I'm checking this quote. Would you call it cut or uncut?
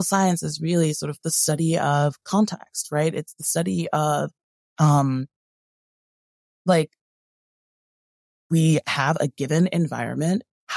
uncut